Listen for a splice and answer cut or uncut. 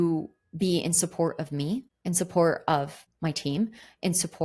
cut